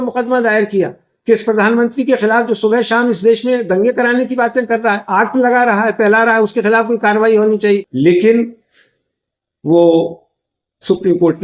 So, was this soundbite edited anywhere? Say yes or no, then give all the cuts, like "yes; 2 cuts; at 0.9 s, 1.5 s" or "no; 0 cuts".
yes; 1 cut; at 7.9 s